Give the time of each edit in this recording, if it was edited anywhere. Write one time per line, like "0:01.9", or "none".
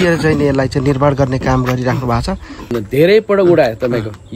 0:02.6